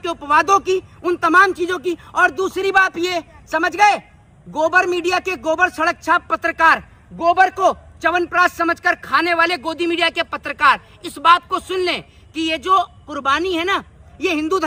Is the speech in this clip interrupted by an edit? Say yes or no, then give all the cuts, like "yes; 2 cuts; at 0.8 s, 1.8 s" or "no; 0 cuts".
no; 0 cuts